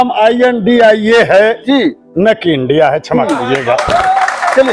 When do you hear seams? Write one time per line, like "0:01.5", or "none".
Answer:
none